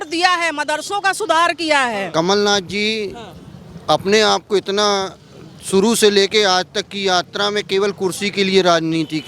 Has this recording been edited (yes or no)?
yes